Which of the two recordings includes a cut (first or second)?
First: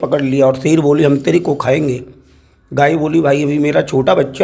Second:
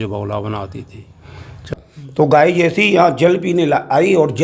second